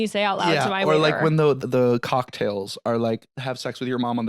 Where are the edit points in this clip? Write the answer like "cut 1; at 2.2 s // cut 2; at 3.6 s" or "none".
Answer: cut 1; at 1.6 s // cut 2; at 3.3 s